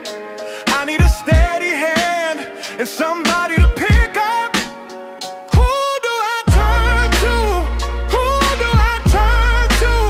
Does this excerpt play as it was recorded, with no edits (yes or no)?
yes